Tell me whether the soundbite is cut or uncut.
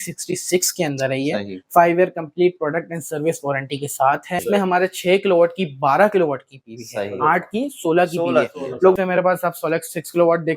cut